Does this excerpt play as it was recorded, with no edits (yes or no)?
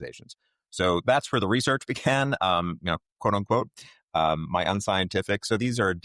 yes